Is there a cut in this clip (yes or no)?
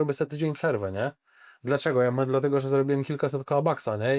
no